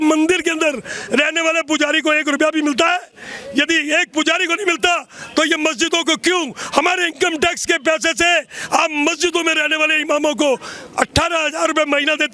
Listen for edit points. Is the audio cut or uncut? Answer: uncut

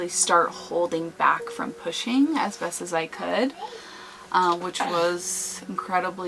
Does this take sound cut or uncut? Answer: uncut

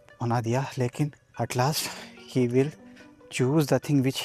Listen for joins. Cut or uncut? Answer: cut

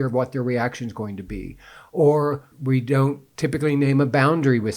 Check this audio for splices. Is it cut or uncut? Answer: cut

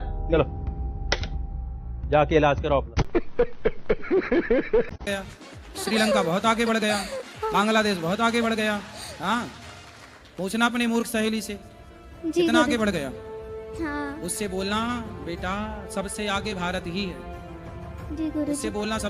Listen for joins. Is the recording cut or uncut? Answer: cut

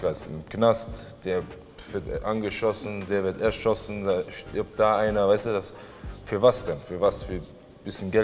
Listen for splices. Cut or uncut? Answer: uncut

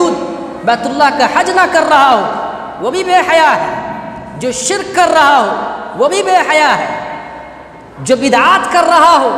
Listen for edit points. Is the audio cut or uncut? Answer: uncut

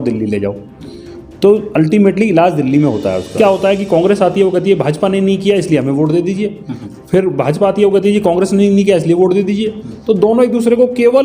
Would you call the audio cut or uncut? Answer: cut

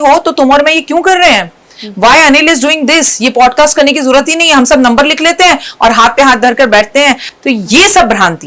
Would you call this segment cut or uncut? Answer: cut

